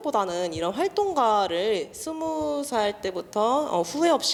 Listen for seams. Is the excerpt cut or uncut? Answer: uncut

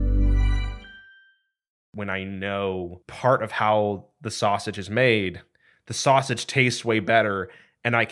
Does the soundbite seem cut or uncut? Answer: cut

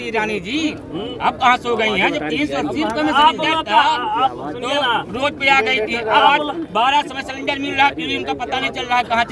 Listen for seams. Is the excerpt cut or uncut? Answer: uncut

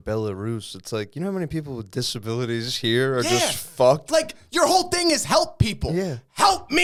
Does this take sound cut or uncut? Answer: uncut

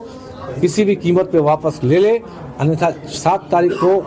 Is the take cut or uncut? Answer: uncut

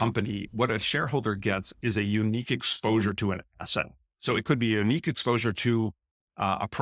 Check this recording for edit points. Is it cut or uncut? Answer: uncut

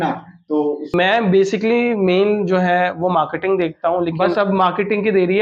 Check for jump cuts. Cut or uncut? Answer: cut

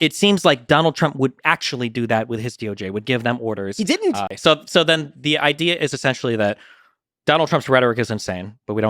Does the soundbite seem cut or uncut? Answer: cut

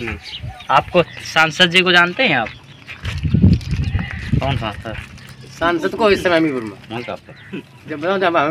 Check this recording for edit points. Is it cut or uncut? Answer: cut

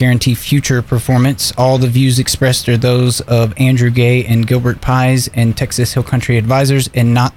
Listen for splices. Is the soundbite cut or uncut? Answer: uncut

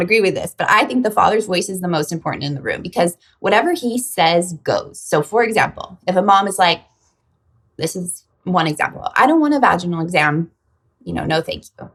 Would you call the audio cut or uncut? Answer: uncut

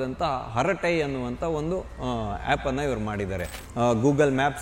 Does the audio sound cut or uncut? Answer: cut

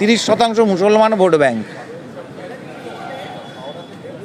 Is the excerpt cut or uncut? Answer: uncut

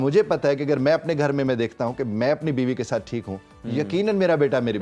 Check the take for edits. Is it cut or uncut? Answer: uncut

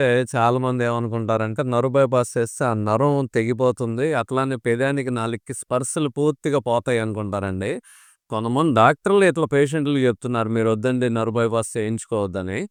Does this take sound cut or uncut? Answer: uncut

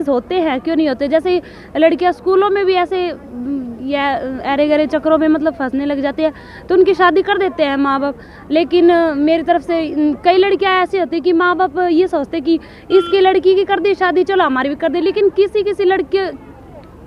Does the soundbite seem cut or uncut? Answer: uncut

